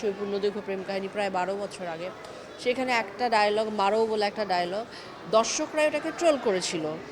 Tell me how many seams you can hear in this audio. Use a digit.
0